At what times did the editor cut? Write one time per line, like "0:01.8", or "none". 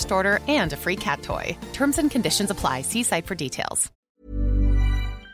0:04.0